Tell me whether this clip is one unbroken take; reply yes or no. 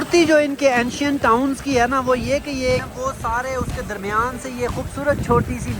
no